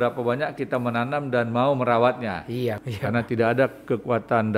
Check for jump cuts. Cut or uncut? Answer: cut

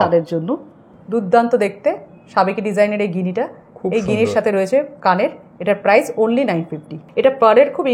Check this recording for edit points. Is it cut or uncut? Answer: cut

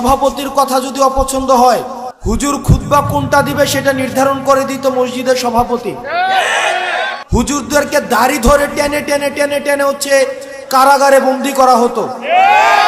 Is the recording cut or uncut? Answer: cut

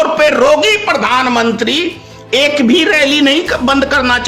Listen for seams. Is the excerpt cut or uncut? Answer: uncut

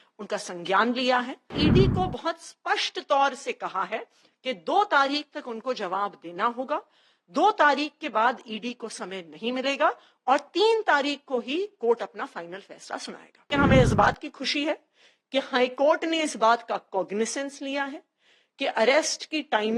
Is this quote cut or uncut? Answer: cut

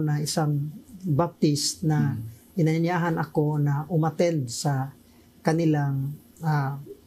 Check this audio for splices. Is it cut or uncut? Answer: uncut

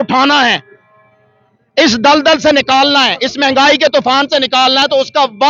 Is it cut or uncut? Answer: uncut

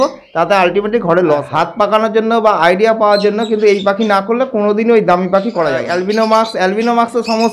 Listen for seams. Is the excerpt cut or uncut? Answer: cut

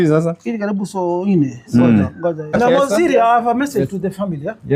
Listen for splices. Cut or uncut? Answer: cut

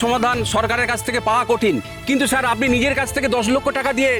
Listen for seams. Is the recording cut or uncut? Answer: uncut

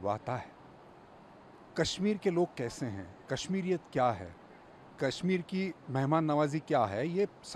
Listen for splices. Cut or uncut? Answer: uncut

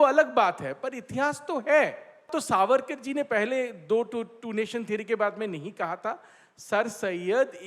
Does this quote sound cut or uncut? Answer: cut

